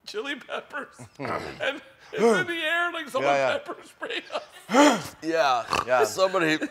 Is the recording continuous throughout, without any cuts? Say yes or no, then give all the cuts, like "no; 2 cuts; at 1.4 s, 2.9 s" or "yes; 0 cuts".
yes; 0 cuts